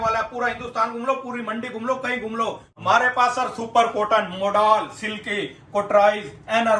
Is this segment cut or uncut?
cut